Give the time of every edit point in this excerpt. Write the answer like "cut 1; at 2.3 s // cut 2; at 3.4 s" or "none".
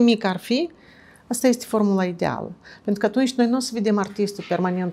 none